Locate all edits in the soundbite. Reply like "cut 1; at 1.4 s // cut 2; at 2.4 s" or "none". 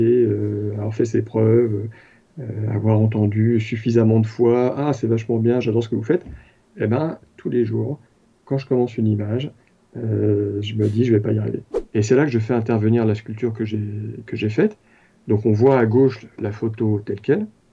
cut 1; at 11.7 s